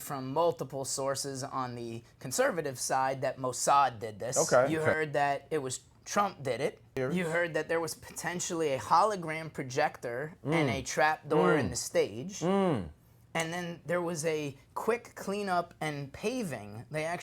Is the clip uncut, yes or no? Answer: no